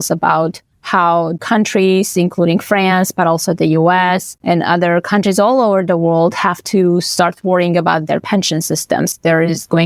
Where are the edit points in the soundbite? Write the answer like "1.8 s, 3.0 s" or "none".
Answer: 1.4 s, 4.3 s, 9.1 s